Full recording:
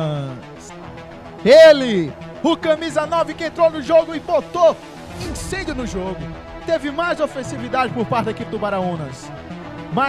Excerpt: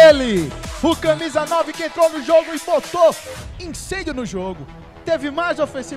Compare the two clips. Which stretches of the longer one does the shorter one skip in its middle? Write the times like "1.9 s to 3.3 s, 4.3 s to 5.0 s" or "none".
none

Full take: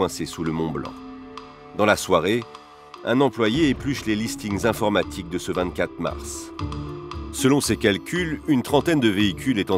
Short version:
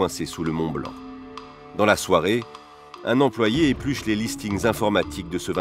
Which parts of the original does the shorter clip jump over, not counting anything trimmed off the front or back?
none

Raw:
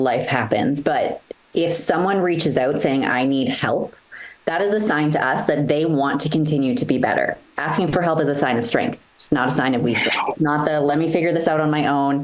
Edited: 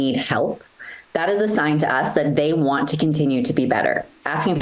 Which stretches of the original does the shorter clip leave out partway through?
none

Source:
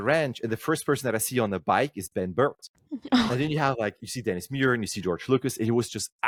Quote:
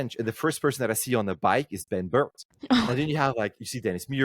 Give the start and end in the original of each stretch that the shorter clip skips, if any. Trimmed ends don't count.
2.7 s to 2.9 s

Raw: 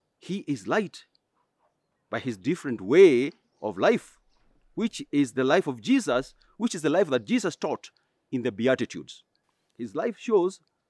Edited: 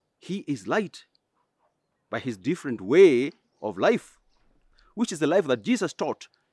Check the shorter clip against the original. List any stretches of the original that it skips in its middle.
4.7 s to 6.3 s

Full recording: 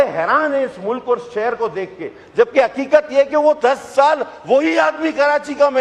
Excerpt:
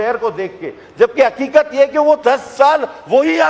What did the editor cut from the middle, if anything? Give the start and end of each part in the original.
none

